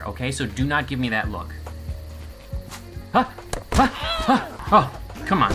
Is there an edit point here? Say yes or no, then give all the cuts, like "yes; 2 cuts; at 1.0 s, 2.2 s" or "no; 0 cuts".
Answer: yes; 1 cut; at 4.5 s